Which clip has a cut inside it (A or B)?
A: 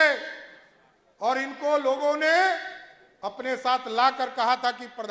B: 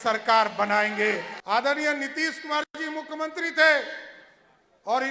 B